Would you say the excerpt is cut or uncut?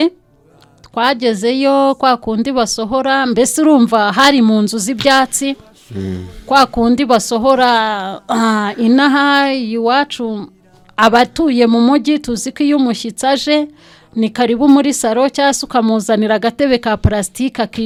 uncut